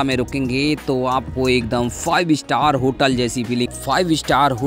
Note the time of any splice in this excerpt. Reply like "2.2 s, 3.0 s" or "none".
3.7 s